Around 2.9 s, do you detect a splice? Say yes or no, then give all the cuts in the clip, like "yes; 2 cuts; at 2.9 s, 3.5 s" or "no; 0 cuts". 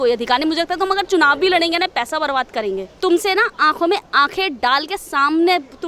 yes; 1 cut; at 2.9 s